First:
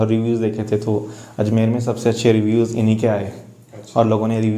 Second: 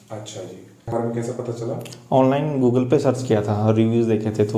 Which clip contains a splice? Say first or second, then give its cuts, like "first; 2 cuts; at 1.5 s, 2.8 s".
second; 1 cut; at 0.9 s